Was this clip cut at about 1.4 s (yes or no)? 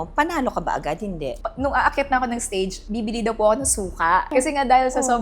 yes